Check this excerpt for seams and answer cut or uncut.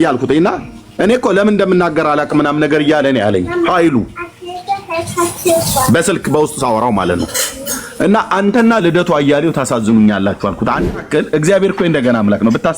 cut